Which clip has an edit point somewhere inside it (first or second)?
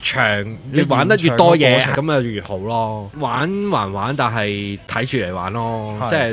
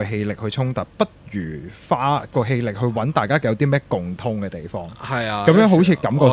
first